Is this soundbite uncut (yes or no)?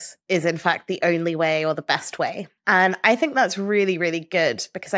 no